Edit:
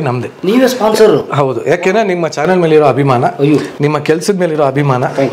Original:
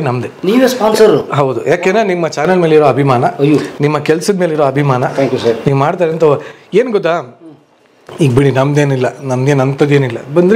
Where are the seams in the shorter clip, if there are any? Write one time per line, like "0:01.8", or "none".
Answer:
none